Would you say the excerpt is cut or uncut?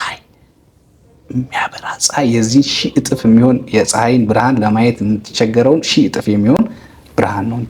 uncut